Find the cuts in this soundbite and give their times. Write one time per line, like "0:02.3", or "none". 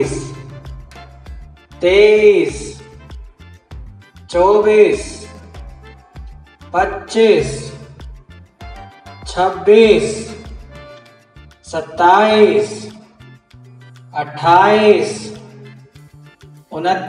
0:08.2
0:09.3